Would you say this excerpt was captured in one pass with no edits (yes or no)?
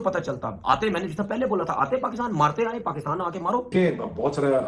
no